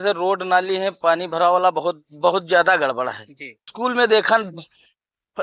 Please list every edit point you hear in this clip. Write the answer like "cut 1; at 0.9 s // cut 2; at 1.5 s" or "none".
cut 1; at 3.7 s